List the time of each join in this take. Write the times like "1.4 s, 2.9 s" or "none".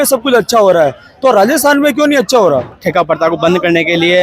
2.8 s